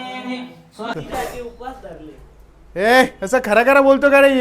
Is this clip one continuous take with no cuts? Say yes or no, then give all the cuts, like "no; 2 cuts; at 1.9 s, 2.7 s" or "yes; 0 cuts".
no; 1 cut; at 0.9 s